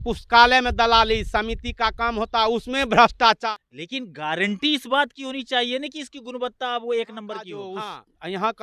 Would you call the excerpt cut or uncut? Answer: cut